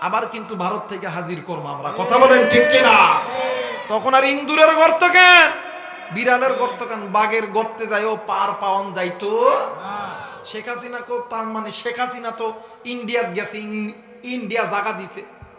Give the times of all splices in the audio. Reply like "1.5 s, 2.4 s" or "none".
none